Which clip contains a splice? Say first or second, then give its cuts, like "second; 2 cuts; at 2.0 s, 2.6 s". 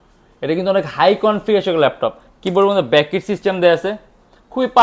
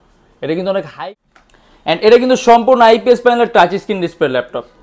second; 1 cut; at 0.9 s